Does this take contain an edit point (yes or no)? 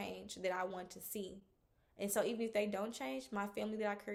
no